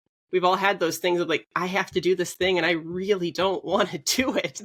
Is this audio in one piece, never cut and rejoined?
yes; 0 cuts

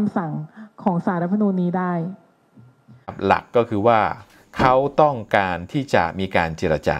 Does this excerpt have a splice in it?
yes; 1 cut; at 3.1 s

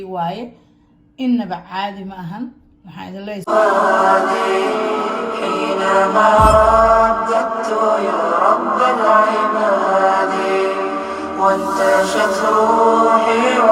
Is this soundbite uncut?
no; 1 cut; at 3.5 s

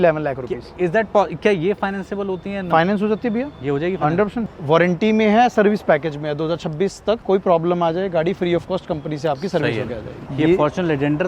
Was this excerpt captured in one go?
no; 3 cuts; at 4.4 s, 7.2 s, 10.3 s

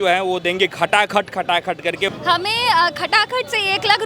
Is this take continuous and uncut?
no; 1 cut; at 2.1 s

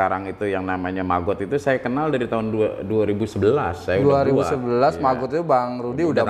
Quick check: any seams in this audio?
no; 0 cuts

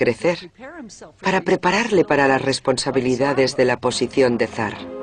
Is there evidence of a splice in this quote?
yes; 1 cut; at 2.1 s

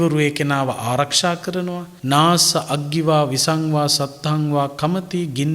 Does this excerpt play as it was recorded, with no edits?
no; 1 cut; at 1.9 s

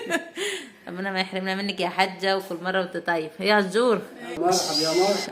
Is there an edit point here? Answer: yes; 1 cut; at 4.4 s

